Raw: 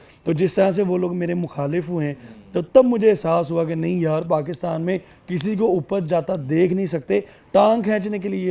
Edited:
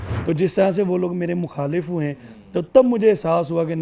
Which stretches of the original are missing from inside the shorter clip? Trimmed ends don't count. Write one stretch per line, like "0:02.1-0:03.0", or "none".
none